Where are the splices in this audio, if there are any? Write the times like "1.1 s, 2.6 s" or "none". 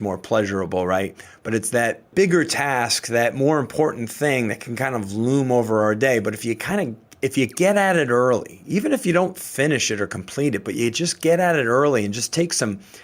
2.1 s